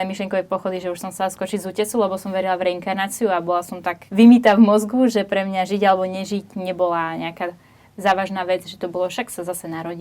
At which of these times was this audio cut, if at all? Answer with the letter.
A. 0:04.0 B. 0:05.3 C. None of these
A